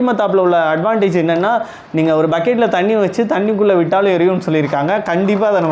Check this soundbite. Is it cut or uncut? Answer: uncut